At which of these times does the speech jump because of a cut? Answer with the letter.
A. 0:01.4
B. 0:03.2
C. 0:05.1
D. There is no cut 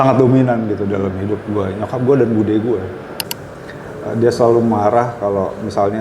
B